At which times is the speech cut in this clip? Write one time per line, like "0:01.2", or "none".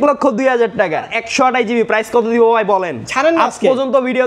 0:01.2